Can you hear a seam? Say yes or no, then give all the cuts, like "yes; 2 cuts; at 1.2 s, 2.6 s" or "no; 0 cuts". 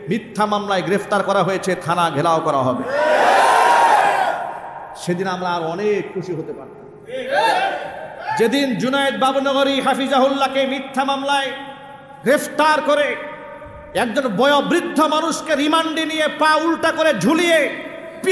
no; 0 cuts